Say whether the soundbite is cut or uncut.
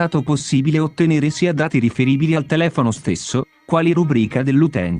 uncut